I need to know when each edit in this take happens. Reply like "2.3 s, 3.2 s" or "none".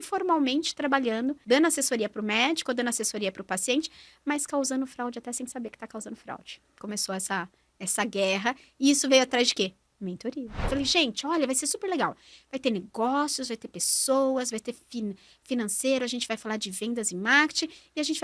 1.4 s, 6.8 s, 10.7 s